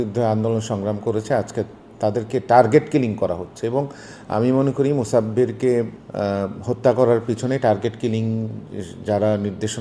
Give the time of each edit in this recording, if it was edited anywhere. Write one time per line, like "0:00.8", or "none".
none